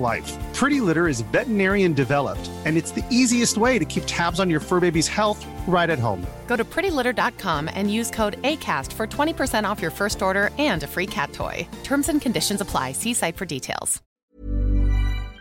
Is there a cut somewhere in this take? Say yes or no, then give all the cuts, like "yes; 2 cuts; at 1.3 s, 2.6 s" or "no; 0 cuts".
yes; 1 cut; at 14.2 s